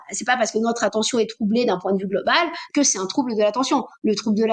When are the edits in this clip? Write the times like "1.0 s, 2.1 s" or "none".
none